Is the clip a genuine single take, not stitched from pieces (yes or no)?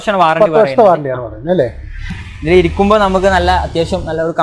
no